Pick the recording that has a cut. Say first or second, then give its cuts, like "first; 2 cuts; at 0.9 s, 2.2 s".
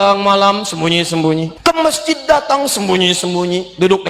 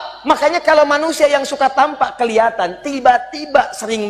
first; 1 cut; at 1.5 s